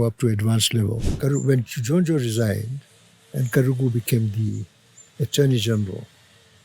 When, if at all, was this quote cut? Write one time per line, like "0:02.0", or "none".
0:01.1

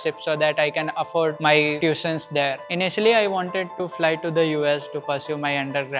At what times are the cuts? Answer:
0:01.4
0:02.6

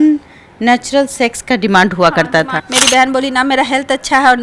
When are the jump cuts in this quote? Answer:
0:02.6

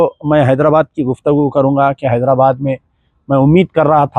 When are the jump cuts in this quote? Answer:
none

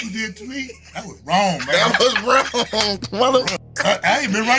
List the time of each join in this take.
none

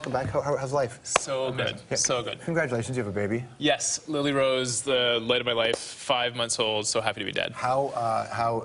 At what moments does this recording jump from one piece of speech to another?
0:02.1

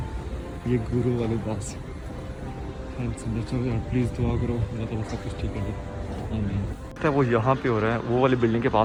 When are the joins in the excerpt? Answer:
none

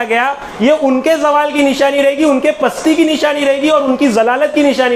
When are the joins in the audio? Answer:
none

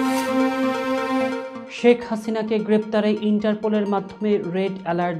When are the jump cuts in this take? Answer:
0:01.6

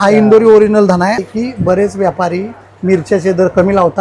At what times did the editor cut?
0:01.2

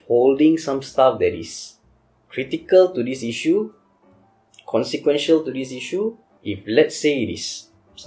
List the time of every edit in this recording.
0:06.3

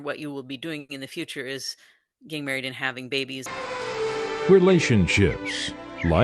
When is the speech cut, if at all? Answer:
0:03.6

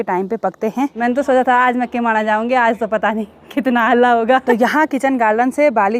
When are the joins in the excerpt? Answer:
0:00.9
0:04.4

